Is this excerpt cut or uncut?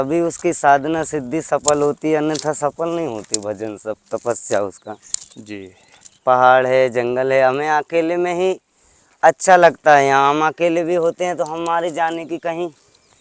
cut